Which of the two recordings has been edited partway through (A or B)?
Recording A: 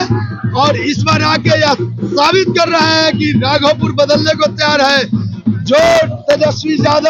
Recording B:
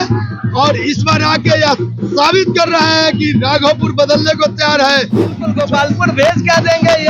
B